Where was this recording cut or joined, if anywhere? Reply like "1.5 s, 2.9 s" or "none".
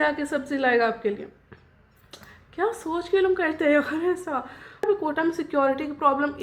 4.9 s